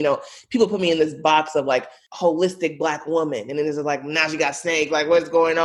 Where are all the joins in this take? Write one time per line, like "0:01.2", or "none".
0:02.0